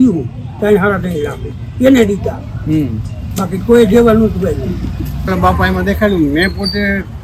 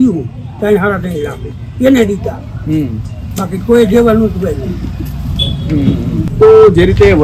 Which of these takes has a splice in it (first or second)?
first